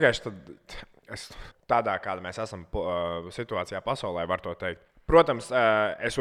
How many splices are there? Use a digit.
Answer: 2